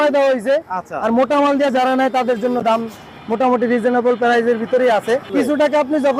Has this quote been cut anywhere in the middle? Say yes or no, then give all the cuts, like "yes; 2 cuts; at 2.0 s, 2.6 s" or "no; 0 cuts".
yes; 1 cut; at 5.3 s